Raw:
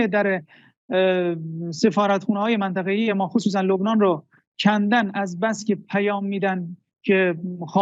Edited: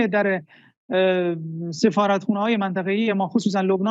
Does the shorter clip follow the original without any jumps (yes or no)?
yes